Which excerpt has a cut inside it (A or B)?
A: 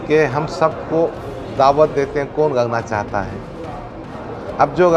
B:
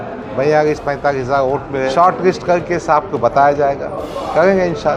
B